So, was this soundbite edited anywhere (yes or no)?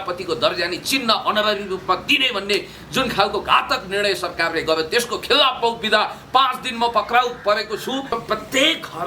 yes